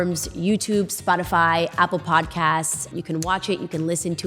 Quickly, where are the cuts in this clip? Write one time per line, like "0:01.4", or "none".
0:02.9